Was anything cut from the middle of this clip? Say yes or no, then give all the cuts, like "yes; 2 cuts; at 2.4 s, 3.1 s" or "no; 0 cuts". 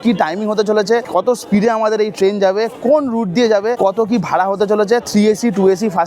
yes; 2 cuts; at 1.1 s, 3.8 s